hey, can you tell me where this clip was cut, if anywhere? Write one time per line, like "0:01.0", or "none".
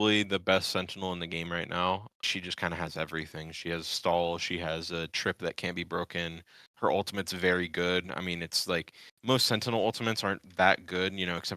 0:02.2